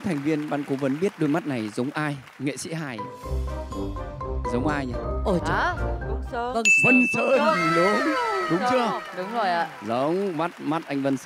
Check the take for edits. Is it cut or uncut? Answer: uncut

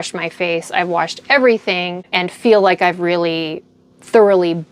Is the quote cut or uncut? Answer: cut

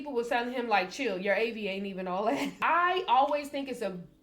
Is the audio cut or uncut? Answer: cut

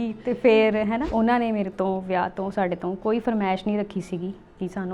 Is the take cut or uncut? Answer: cut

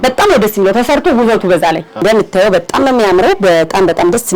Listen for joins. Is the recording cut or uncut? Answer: cut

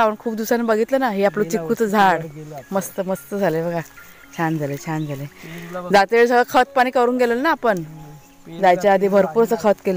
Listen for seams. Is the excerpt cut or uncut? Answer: uncut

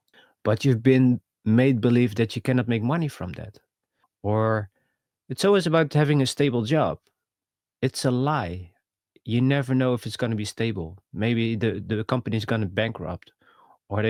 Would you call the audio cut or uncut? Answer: uncut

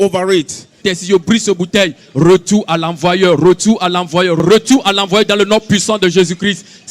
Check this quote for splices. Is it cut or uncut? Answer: cut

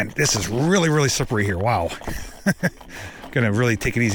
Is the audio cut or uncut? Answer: uncut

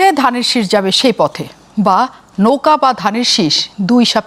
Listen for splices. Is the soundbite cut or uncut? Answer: uncut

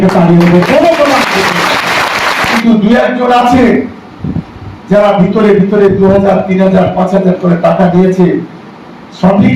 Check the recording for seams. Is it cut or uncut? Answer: cut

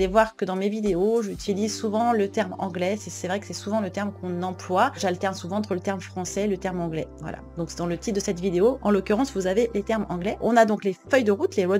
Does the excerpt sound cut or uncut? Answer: cut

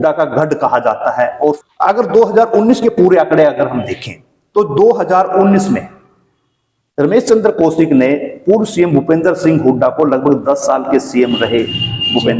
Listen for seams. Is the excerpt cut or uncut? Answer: uncut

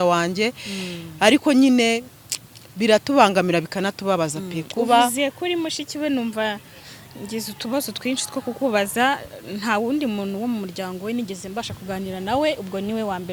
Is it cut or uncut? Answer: uncut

